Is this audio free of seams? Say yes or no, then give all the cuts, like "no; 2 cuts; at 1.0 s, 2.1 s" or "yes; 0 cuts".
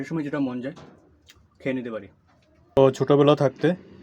no; 1 cut; at 2.8 s